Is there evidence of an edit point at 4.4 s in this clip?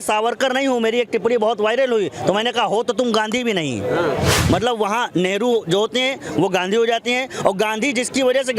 yes; 1 cut; at 4.4 s

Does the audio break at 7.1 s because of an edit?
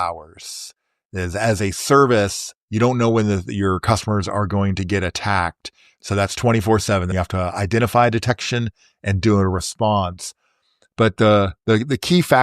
yes; 2 cuts; at 5.9 s, 7.1 s

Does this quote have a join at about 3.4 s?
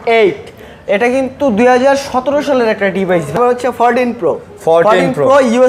yes; 1 cut; at 3.4 s

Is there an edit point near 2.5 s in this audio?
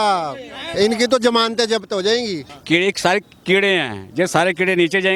yes; 1 cut; at 2.5 s

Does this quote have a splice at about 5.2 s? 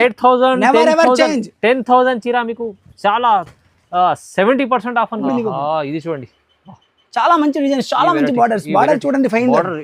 yes; 1 cut; at 5.2 s

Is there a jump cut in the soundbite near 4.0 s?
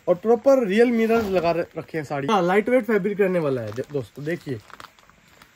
no; 1 cut; at 2.3 s

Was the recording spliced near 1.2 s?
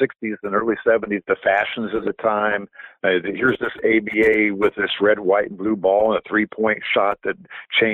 yes; 1 cut; at 1.2 s

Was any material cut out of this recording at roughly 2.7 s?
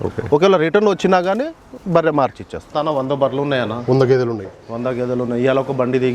yes; 1 cut; at 2.7 s

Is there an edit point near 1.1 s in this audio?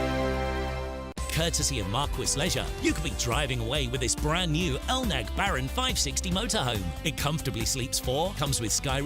yes; 1 cut; at 1.1 s

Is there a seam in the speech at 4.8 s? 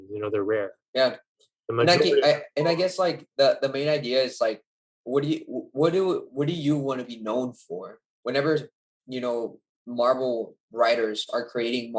no; 1 cut; at 8.1 s

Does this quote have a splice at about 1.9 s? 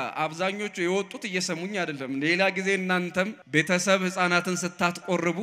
no; 1 cut; at 3.4 s

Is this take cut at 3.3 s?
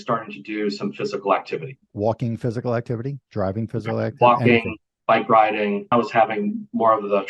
no; 2 cuts; at 1.8 s, 5.9 s

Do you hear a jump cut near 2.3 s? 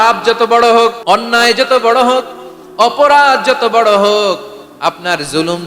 no; 1 cut; at 1.0 s

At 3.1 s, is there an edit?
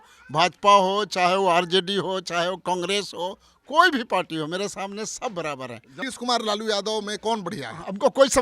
no; 1 cut; at 6.0 s

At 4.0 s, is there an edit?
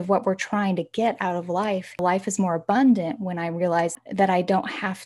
yes; 2 cuts; at 2.0 s, 4.0 s

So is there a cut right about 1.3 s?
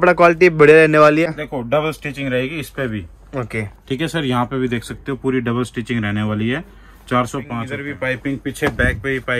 yes; 2 cuts; at 1.3 s, 7.5 s

